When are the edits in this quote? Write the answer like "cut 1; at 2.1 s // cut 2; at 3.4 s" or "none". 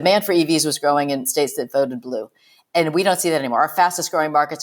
cut 1; at 1.3 s